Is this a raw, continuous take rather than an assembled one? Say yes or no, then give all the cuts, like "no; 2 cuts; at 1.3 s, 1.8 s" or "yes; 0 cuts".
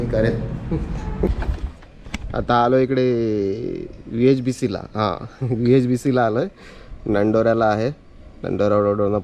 no; 1 cut; at 1.3 s